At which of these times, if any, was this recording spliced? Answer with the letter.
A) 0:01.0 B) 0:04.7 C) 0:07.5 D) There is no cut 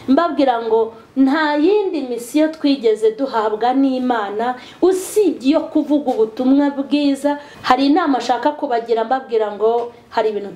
C